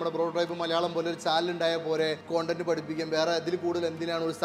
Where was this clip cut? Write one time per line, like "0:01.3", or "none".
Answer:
0:02.2